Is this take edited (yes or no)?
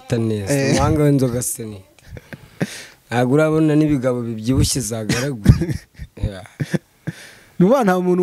no